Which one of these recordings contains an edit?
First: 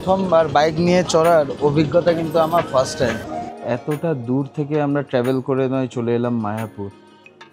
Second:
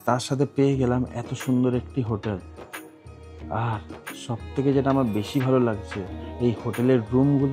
first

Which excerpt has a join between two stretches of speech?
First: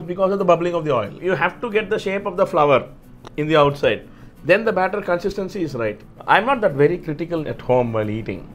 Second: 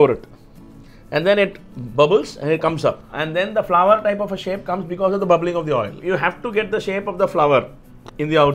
first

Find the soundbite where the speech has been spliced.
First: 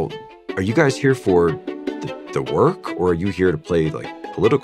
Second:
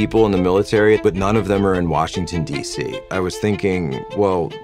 second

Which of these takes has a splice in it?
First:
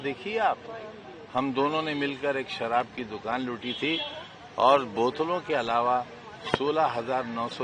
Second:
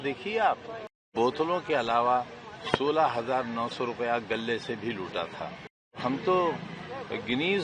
second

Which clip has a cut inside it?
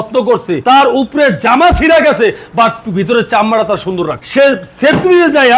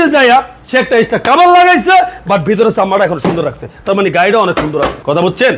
first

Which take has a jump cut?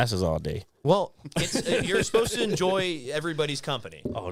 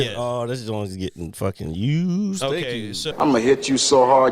second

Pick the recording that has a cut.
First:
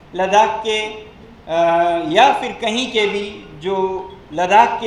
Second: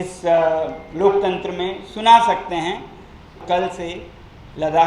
second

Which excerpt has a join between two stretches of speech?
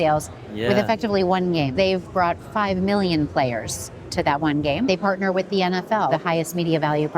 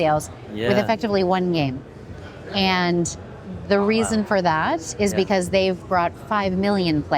first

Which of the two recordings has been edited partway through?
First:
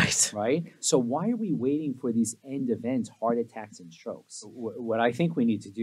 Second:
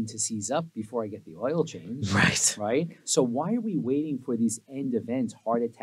first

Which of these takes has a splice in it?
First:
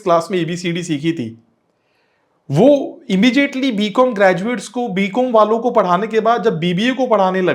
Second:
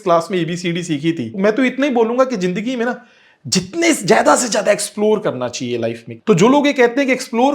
second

